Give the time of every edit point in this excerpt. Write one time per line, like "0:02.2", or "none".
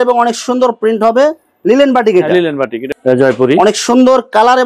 0:02.8